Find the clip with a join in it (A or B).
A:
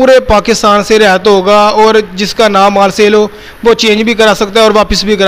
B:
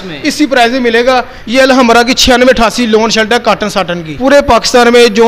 B